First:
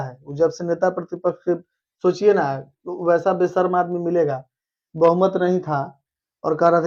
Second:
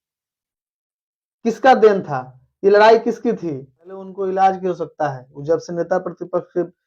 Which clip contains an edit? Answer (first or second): second